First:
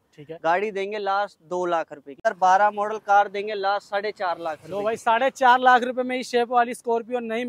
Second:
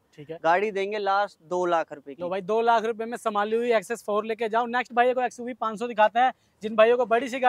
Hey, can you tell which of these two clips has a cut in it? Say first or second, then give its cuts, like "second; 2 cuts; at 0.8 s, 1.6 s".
first; 1 cut; at 2.2 s